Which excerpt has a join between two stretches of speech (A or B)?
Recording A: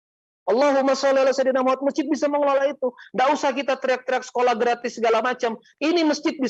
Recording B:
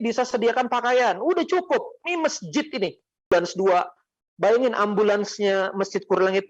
B